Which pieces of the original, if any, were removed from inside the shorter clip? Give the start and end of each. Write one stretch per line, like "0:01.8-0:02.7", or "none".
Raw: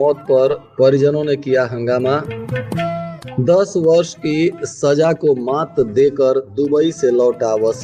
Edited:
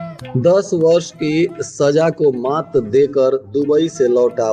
none